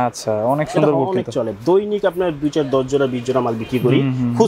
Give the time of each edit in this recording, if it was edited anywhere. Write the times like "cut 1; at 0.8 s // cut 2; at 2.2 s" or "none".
none